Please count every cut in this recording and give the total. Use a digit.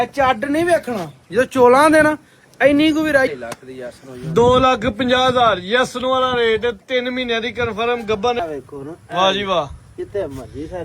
2